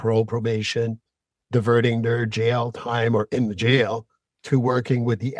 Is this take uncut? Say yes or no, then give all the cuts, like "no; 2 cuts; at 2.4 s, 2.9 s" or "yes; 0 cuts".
yes; 0 cuts